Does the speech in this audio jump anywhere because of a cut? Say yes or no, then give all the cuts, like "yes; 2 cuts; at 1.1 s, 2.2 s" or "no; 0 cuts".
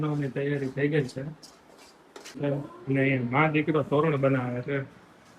yes; 1 cut; at 2.4 s